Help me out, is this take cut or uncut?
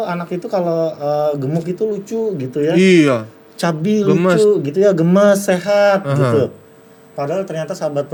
uncut